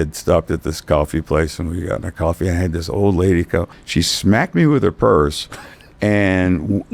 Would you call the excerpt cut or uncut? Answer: cut